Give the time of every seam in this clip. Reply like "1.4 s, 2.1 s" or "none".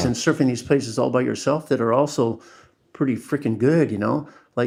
none